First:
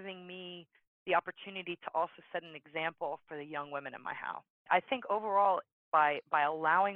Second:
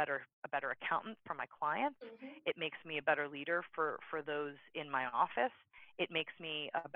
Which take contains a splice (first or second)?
first